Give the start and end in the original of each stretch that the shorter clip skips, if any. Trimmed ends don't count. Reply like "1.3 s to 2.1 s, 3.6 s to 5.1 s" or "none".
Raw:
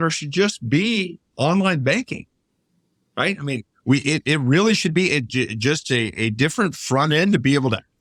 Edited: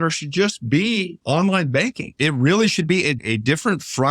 1.1 s to 1.3 s, 2.3 s to 4.2 s, 5.3 s to 6.1 s